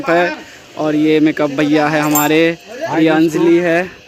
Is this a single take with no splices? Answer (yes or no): yes